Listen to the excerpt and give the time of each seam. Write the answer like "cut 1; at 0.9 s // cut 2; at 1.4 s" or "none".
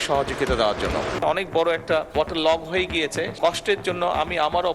cut 1; at 1.1 s // cut 2; at 2.1 s // cut 3; at 3.3 s